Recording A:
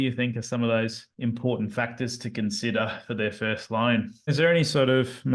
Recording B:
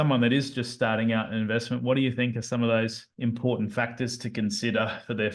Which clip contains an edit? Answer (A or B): A